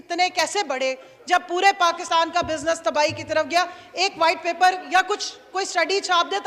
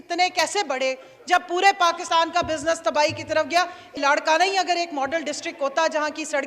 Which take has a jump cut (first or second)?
second